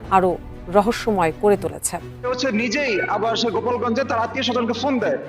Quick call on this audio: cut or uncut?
cut